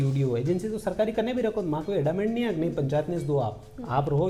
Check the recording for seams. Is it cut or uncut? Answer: uncut